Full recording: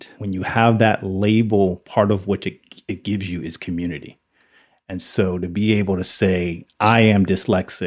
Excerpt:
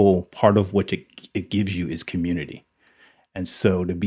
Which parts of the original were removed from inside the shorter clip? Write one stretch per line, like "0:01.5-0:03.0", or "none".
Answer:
none